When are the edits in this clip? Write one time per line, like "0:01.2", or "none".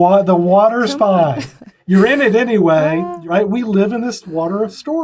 0:01.8
0:03.1
0:04.2